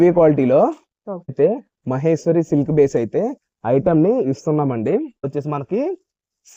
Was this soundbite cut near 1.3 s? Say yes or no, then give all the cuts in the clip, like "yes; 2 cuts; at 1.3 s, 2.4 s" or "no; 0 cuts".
yes; 2 cuts; at 1.3 s, 5.2 s